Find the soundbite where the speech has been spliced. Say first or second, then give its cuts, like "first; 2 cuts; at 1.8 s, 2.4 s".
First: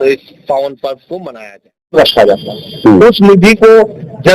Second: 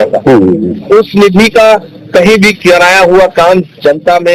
first; 1 cut; at 1.9 s